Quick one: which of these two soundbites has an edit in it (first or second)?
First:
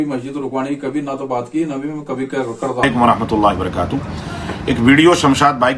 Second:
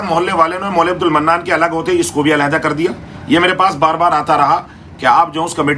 first